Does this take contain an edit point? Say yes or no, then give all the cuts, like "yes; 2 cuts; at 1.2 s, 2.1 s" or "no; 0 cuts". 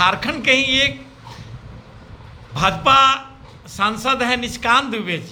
no; 0 cuts